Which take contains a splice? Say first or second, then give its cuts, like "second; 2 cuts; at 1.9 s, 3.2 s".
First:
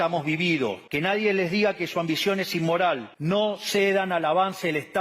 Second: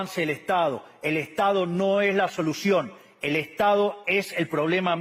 first; 2 cuts; at 0.8 s, 3.1 s